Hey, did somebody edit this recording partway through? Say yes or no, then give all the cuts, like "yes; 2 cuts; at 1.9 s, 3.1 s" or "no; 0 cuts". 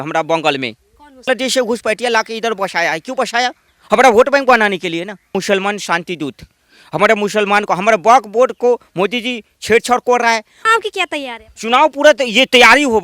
yes; 3 cuts; at 1.3 s, 5.3 s, 10.6 s